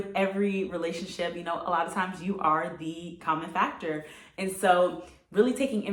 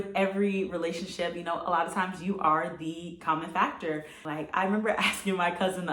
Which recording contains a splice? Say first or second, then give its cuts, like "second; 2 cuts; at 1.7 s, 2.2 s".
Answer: second; 1 cut; at 4.3 s